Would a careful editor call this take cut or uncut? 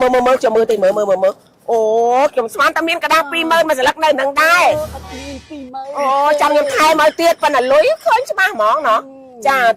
uncut